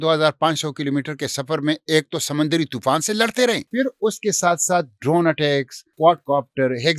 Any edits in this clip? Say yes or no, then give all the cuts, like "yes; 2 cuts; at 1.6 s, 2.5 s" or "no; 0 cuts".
yes; 2 cuts; at 3.6 s, 5.8 s